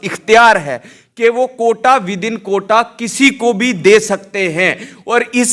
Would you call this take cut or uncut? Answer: uncut